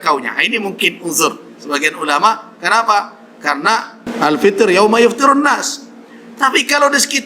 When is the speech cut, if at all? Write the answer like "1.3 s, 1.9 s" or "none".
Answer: 4.0 s